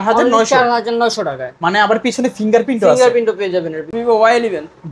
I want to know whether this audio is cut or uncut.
cut